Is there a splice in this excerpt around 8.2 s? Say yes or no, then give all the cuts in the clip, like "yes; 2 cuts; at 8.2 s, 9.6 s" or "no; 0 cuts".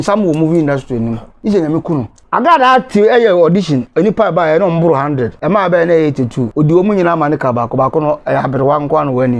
no; 4 cuts; at 1.3 s, 2.2 s, 5.3 s, 6.4 s